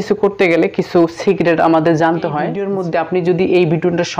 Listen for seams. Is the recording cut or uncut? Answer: cut